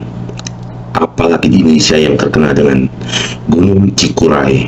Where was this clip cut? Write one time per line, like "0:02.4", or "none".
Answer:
none